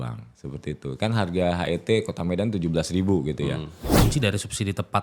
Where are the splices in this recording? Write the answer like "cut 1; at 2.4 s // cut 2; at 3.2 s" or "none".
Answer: cut 1; at 3.9 s